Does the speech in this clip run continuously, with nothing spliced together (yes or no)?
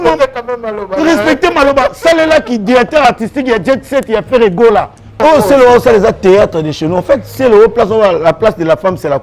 no